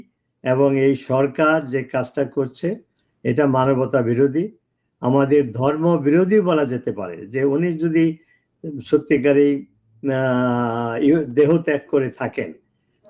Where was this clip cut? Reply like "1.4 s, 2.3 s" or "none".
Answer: none